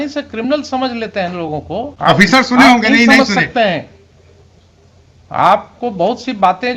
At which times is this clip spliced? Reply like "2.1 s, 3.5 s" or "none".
1.9 s